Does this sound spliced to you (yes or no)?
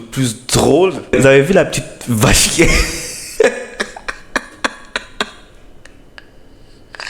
yes